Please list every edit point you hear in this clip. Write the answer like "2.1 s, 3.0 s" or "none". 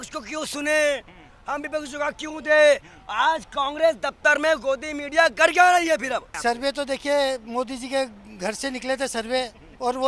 6.4 s